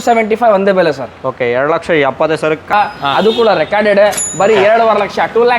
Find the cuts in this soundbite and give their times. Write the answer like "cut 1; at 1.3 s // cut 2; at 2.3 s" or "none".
cut 1; at 2.7 s

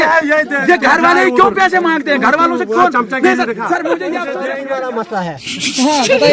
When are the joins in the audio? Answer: cut 1; at 4.4 s

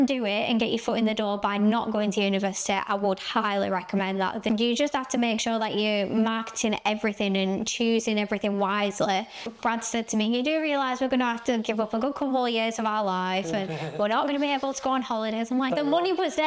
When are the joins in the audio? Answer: cut 1; at 4.4 s // cut 2; at 9.4 s // cut 3; at 15.7 s

